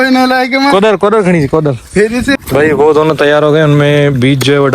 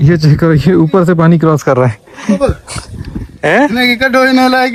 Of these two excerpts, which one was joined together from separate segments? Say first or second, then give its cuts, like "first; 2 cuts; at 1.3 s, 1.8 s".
first; 1 cut; at 2.4 s